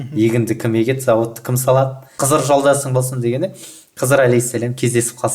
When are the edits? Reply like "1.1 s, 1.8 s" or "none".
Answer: 2.1 s